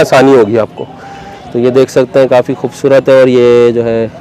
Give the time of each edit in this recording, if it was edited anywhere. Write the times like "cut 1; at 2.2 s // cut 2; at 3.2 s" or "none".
none